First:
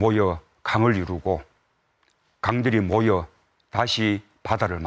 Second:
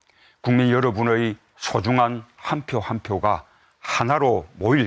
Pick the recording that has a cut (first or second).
first